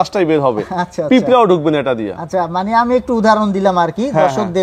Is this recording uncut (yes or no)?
yes